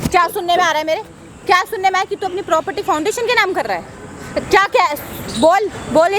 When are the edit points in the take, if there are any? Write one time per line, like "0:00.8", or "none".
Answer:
none